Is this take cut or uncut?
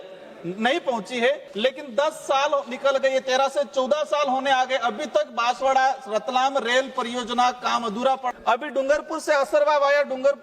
cut